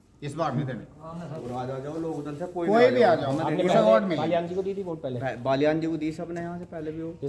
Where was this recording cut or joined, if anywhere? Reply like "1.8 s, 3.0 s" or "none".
1.4 s

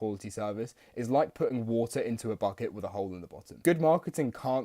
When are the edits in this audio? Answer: 3.6 s

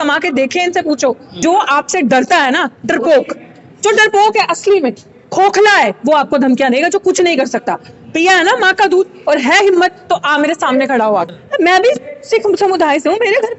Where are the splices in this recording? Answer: 1.4 s, 11.3 s

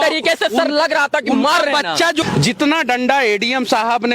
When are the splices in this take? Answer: 2.2 s

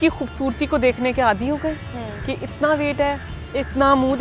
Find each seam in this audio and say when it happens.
none

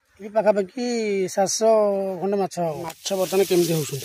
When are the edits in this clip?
3.0 s

